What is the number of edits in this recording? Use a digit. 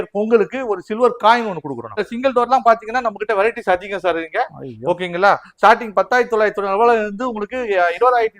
1